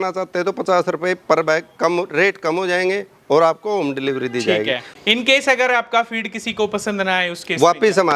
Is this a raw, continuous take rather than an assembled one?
no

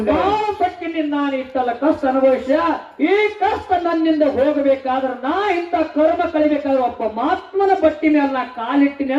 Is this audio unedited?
yes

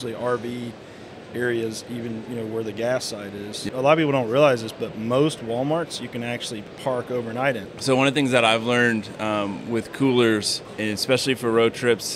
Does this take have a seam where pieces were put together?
yes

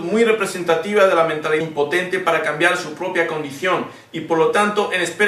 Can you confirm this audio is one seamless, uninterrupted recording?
yes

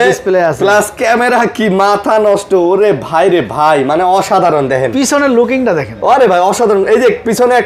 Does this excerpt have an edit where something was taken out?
no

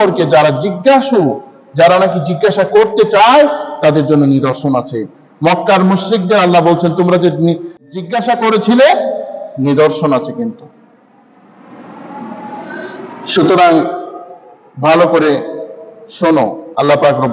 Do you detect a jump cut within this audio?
yes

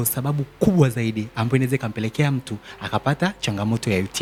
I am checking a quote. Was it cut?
no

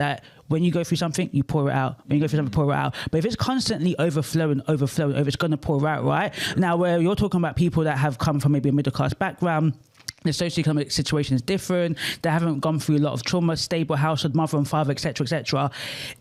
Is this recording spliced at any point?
no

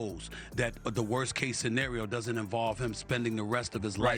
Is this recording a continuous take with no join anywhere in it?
yes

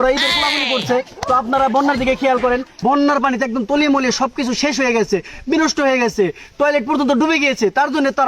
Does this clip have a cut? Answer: yes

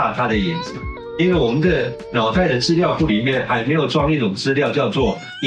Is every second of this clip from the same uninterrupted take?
no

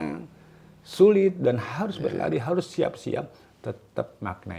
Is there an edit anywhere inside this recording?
no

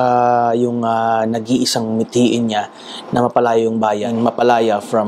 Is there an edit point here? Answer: yes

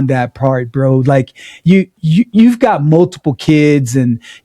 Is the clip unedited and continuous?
yes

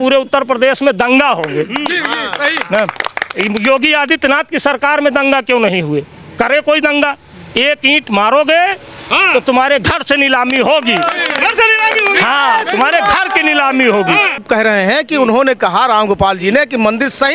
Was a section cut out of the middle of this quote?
yes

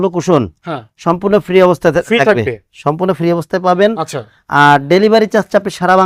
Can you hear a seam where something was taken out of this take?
no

